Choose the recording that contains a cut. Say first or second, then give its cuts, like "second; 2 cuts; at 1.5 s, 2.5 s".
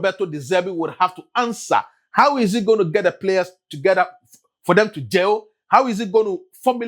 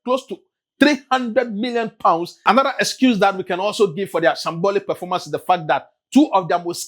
second; 1 cut; at 2.3 s